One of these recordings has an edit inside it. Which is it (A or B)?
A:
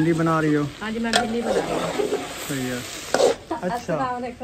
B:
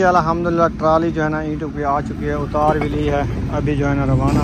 A